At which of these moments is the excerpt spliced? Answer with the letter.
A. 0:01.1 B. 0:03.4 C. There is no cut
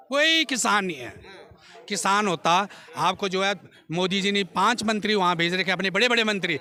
C